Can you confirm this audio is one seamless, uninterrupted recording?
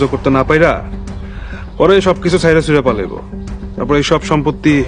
yes; 0 cuts

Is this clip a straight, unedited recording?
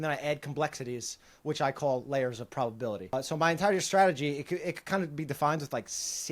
no; 1 cut; at 3.1 s

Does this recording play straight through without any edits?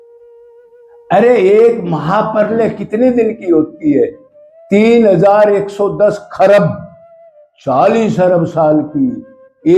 no; 1 cut; at 1.0 s

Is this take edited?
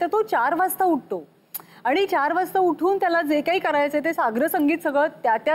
no; 0 cuts

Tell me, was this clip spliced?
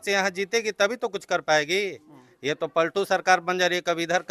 no; 0 cuts

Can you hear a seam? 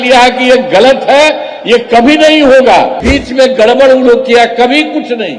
yes; 1 cut; at 3.0 s

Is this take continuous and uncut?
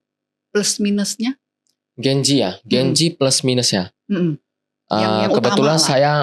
yes; 0 cuts

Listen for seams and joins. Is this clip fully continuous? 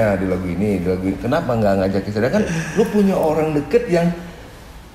yes; 0 cuts

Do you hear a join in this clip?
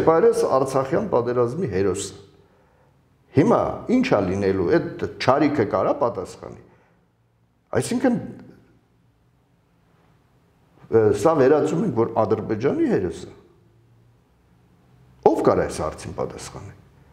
no; 0 cuts

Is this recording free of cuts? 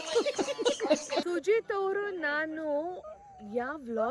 no; 1 cut; at 1.1 s

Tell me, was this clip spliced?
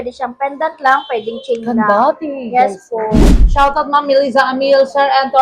yes; 1 cut; at 3.2 s

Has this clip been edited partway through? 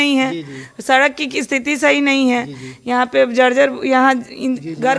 no; 0 cuts

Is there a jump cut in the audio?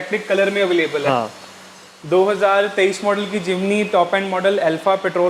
no; 0 cuts

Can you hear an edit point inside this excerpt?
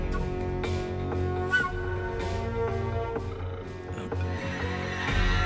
yes; 1 cut; at 2.1 s

